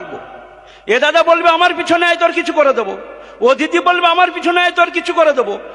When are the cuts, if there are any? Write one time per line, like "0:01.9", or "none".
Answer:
none